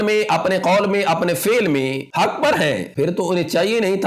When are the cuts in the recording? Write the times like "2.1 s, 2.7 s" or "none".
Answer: 2.0 s, 2.9 s